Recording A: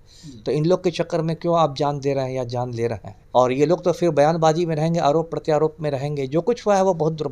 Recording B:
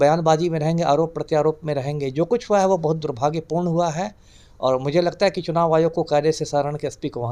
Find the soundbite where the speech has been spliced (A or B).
A